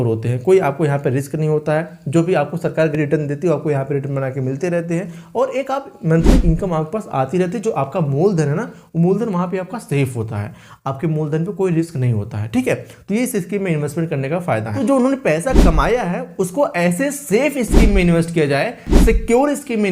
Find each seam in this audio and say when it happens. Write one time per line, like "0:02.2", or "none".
0:02.9
0:14.7